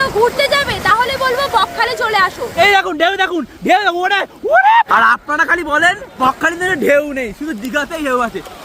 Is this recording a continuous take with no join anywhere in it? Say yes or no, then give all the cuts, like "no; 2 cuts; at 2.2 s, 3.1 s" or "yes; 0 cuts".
no; 3 cuts; at 2.6 s, 4.9 s, 6.2 s